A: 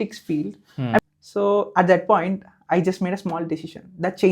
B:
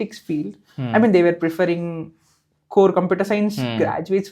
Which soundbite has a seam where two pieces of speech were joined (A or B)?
A